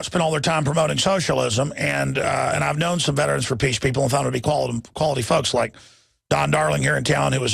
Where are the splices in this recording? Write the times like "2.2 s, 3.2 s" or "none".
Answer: 4.4 s